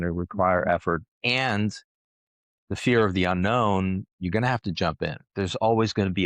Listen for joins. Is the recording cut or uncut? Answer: cut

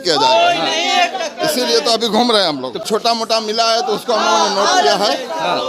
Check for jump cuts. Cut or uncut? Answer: cut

